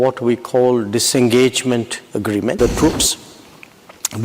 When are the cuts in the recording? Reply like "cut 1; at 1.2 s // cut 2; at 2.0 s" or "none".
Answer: cut 1; at 2.6 s